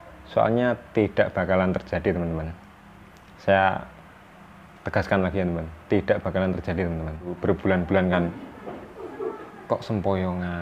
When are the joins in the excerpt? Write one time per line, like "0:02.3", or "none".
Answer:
0:07.4